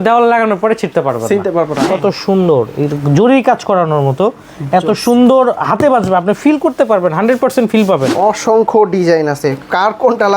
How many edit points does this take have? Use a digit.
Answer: 2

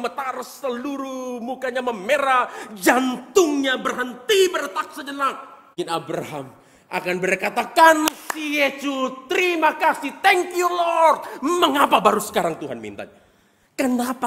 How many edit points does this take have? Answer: 1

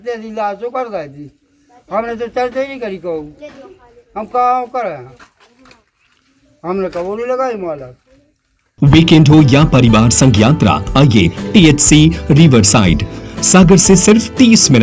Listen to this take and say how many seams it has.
1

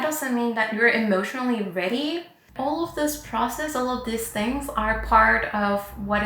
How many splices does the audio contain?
1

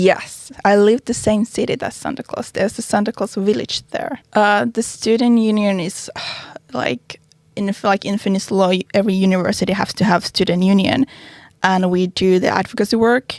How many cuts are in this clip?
1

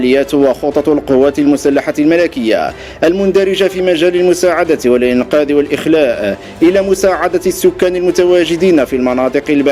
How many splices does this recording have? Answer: 0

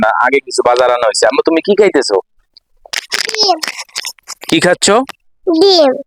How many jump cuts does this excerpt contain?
0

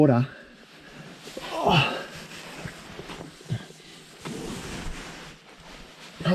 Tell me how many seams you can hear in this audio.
0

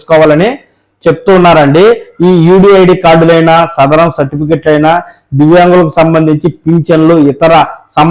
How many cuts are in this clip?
0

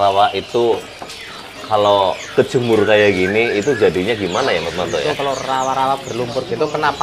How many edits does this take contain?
0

